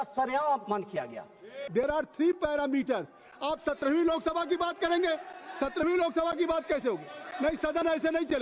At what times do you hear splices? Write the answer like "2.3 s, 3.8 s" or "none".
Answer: 1.5 s